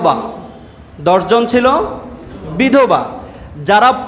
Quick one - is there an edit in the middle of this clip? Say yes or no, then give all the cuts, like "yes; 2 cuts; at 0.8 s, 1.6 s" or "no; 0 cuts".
no; 0 cuts